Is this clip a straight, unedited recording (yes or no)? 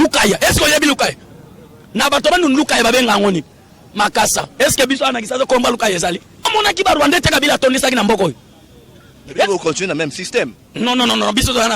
no